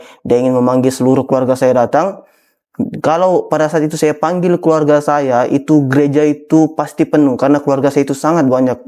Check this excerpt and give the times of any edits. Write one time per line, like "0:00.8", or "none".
none